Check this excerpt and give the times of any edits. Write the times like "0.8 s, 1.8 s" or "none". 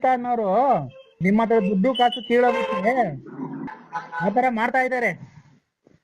1.1 s, 3.7 s